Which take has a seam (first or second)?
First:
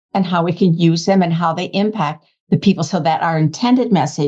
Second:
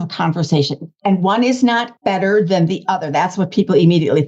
second